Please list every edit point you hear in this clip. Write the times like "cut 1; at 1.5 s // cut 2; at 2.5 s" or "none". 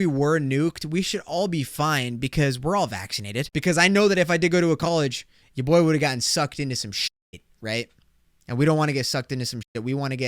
cut 1; at 3.5 s

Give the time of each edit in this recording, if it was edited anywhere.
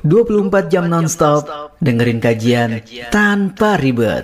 none

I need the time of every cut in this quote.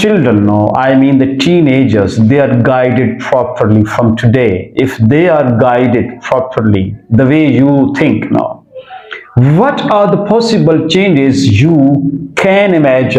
none

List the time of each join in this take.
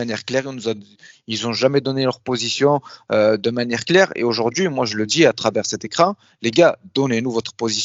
none

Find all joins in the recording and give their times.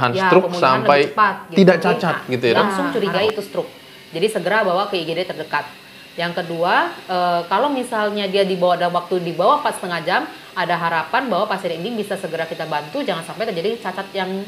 cut 1; at 2.8 s

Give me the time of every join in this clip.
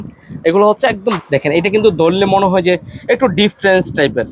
cut 1; at 1.2 s

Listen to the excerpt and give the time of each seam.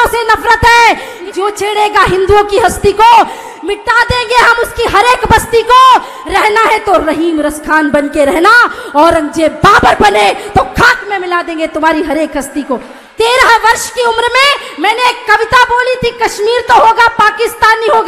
cut 1; at 1.1 s // cut 2; at 13.0 s

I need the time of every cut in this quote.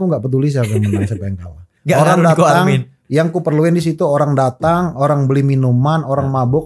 none

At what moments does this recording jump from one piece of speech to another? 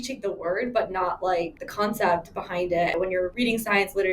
cut 1; at 1.6 s // cut 2; at 3.0 s

